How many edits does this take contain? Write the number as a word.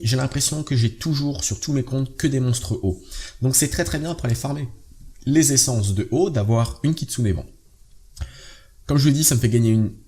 one